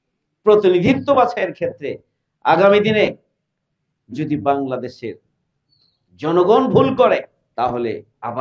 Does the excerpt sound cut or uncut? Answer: cut